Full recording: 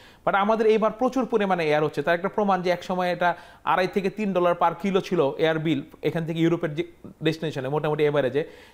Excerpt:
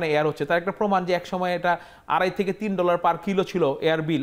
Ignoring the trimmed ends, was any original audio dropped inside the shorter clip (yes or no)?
no